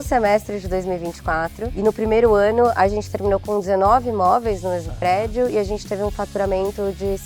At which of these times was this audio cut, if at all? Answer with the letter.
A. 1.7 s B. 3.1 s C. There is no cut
A